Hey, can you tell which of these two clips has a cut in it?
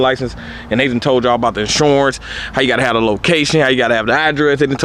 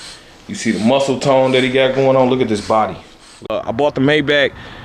second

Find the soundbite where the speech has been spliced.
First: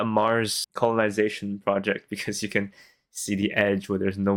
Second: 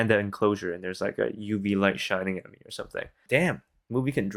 second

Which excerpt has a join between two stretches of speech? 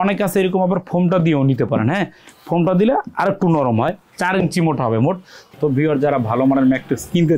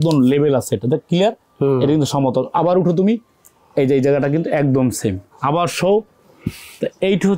first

